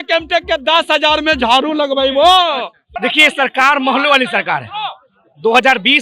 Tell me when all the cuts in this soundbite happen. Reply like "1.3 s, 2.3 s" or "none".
3.0 s